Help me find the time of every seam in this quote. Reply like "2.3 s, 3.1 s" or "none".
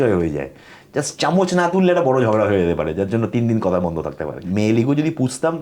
4.5 s